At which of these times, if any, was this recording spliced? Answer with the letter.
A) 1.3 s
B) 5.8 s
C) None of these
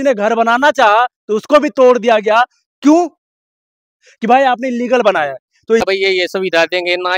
B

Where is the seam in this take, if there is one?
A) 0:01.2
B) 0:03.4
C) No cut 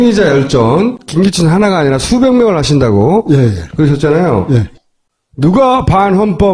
A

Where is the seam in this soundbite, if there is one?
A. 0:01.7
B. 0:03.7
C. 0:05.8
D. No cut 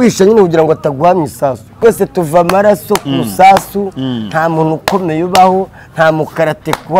A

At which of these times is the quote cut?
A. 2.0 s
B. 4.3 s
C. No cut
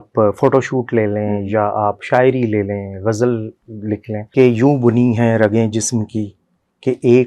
B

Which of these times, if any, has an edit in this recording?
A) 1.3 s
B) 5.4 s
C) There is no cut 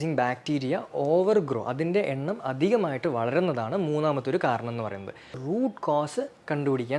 B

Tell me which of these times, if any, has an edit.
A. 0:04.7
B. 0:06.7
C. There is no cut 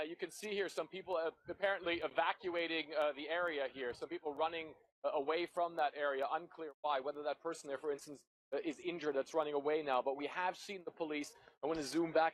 C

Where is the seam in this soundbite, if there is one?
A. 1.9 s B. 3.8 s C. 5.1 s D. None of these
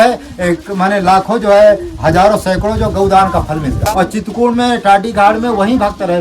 B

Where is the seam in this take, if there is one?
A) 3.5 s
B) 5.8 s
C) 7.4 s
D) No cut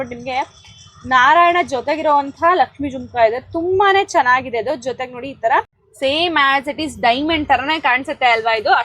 B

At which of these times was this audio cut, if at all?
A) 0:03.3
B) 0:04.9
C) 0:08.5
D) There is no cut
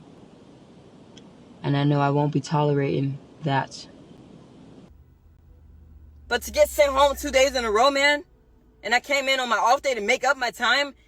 B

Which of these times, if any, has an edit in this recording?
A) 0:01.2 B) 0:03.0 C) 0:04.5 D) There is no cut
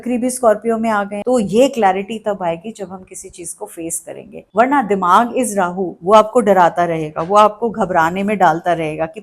A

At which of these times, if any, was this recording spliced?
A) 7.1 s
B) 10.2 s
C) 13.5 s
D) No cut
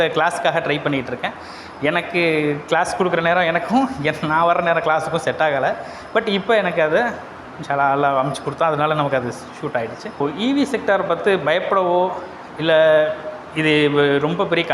B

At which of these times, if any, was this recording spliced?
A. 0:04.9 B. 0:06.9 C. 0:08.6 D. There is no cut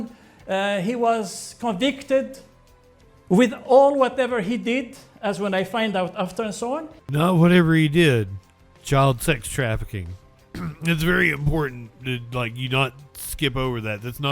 B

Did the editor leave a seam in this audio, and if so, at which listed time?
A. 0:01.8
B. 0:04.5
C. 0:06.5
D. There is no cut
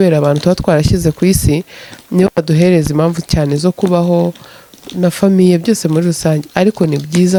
D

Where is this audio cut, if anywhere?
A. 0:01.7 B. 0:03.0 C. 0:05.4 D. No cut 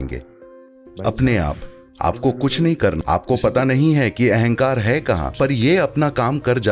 B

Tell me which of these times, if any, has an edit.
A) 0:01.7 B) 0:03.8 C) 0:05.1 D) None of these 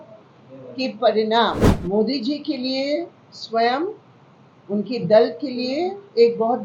A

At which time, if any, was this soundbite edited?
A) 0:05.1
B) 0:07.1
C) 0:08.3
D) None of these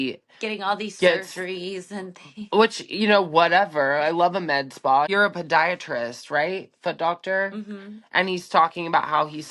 A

